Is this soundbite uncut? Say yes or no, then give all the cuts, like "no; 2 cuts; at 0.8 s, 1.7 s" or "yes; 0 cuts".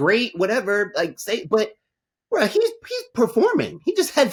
yes; 0 cuts